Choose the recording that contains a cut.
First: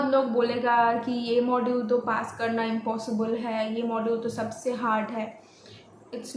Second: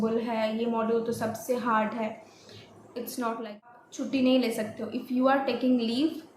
second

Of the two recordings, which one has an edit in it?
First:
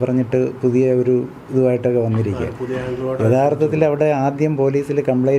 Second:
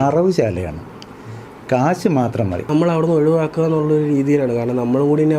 second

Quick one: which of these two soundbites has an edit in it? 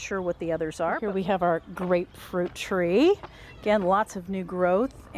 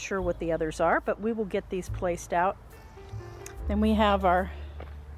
first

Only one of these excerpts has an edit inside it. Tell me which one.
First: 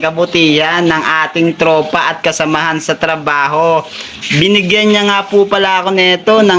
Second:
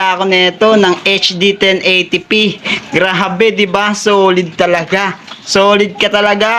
first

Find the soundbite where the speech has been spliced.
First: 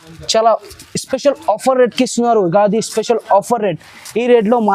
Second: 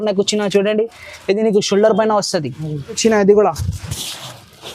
second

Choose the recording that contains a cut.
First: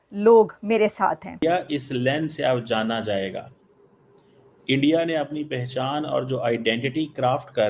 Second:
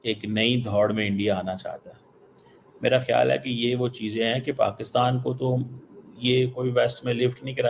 first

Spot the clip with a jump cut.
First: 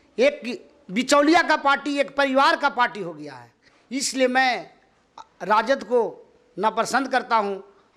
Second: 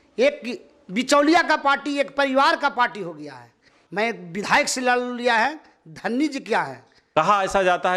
second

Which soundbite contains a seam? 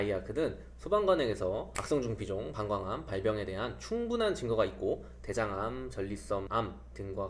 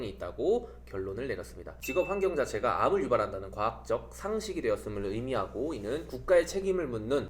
second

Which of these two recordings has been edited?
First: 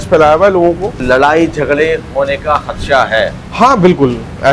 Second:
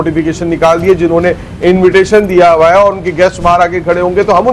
first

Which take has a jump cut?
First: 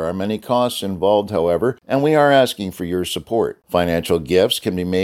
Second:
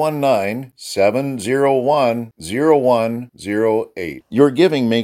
first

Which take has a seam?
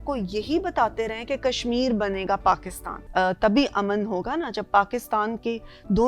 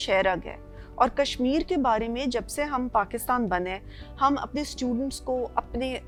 first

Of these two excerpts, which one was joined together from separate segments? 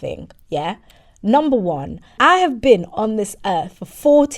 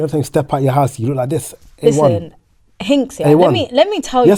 first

